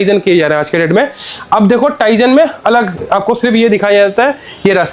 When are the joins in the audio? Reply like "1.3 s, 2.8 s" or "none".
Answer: none